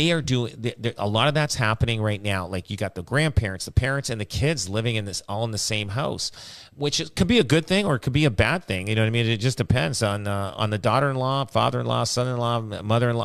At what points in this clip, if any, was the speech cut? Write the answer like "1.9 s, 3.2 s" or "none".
none